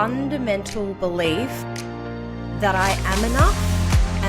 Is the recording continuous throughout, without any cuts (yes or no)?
yes